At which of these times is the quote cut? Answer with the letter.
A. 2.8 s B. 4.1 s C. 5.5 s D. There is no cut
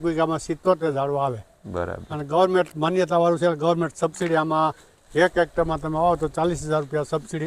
D